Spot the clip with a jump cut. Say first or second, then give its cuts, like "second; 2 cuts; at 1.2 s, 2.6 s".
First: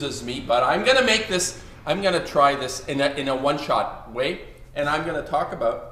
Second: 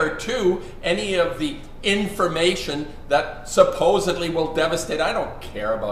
second; 1 cut; at 2.9 s